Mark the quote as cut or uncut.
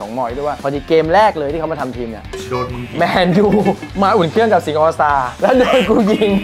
uncut